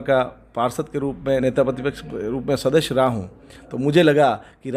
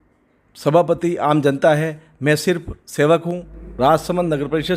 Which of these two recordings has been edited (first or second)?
second